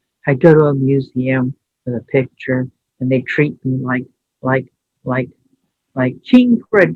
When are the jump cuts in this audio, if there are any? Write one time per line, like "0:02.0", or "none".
none